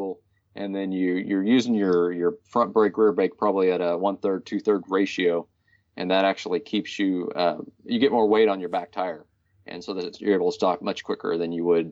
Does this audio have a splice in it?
no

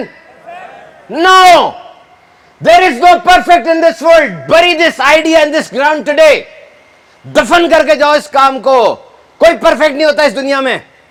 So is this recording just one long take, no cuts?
yes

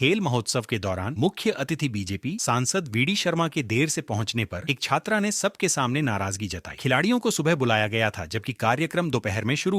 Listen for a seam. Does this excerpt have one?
no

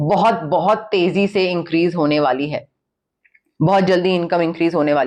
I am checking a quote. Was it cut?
no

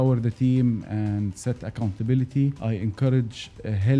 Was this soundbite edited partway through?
yes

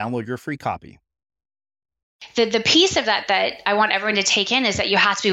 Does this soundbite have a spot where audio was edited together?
yes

